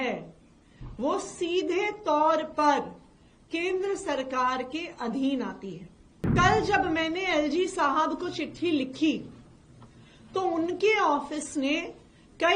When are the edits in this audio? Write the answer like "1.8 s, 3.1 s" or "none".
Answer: 6.3 s